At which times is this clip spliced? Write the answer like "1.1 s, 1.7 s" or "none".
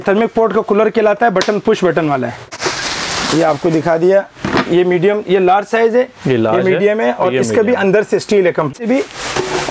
2.6 s, 8.8 s